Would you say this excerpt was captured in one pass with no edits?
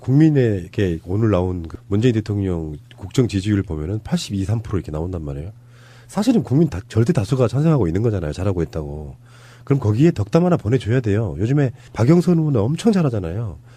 yes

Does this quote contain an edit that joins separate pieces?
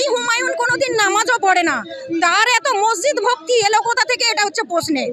no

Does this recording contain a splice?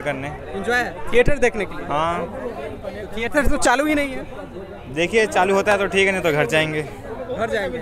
no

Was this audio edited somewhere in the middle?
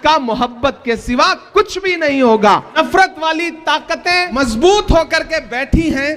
yes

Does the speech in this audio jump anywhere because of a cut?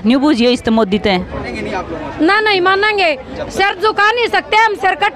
yes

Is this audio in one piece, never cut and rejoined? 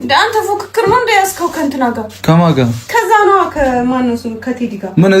yes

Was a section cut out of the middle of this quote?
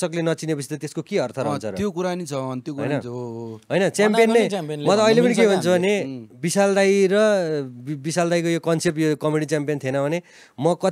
no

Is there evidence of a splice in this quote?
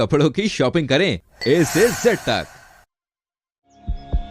no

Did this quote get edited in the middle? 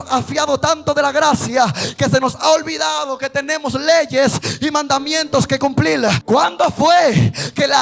yes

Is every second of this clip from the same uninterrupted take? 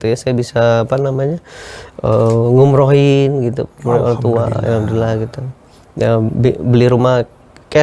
yes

